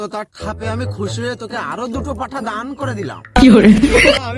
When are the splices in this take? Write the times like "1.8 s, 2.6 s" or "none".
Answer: none